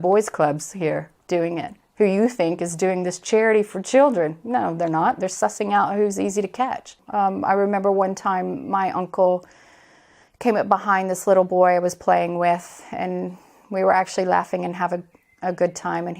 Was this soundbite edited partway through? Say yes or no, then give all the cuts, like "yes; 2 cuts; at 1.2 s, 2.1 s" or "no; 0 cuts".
yes; 1 cut; at 7.0 s